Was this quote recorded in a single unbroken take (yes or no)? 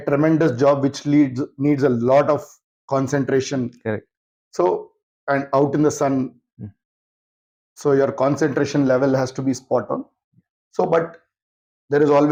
yes